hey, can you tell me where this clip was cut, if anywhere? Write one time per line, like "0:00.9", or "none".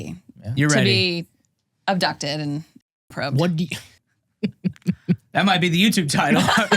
0:03.8